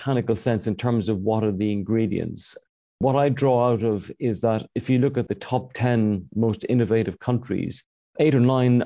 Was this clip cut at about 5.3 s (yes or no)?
yes